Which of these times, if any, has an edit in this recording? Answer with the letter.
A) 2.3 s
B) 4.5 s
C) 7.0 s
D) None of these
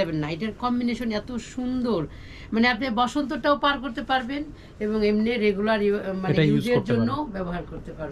D